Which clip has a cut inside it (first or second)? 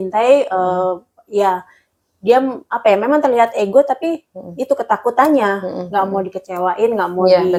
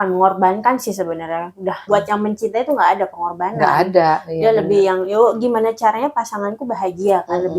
second